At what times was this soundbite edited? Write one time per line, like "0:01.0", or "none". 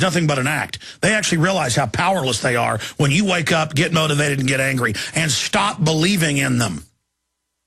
0:01.8